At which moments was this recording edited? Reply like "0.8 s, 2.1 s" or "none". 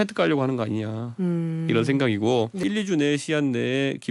2.6 s